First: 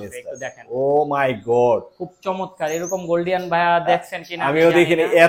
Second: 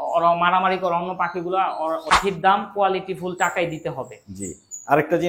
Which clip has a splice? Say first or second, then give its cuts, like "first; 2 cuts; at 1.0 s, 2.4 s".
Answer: second; 1 cut; at 2.2 s